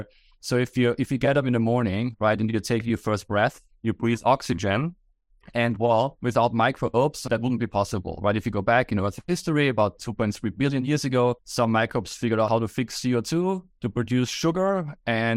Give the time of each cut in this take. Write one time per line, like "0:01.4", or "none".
0:06.2
0:07.2
0:11.4
0:12.5
0:13.7